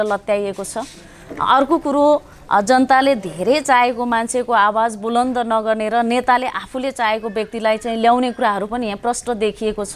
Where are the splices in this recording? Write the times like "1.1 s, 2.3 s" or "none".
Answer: none